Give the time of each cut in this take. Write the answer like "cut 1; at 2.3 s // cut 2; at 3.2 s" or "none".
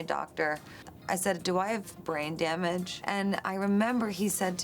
cut 1; at 3.0 s

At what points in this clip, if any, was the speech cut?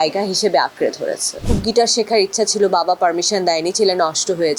cut 1; at 1.4 s

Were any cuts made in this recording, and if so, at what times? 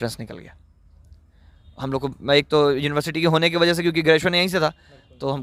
none

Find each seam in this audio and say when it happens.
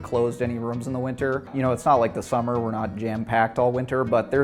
cut 1; at 1.5 s

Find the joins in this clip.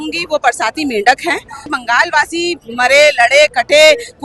cut 1; at 1.6 s

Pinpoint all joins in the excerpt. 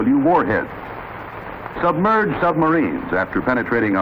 cut 1; at 1.1 s

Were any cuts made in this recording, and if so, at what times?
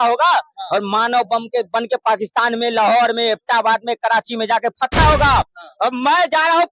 none

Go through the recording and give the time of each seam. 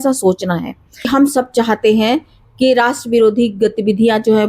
cut 1; at 1.1 s

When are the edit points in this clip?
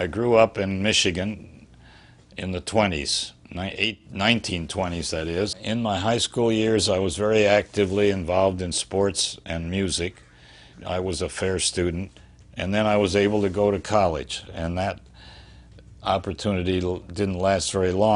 cut 1; at 5.6 s // cut 2; at 10.7 s // cut 3; at 12.1 s // cut 4; at 14.5 s

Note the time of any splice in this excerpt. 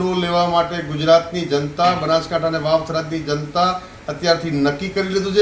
none

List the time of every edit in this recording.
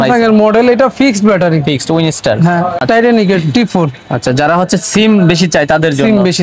cut 1; at 2.8 s

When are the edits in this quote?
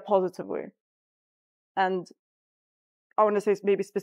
none

